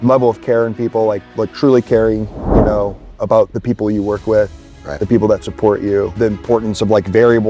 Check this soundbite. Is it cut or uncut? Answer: cut